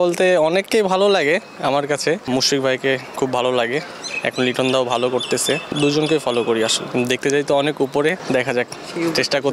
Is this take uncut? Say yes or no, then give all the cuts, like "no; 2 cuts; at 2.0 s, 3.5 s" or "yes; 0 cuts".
no; 4 cuts; at 2.2 s, 5.7 s, 6.8 s, 8.2 s